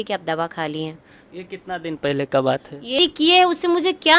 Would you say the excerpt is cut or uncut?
cut